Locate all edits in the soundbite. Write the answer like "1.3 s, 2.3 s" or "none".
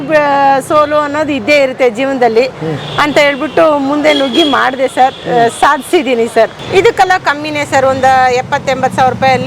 6.6 s